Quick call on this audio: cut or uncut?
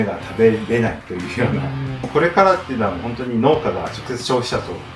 cut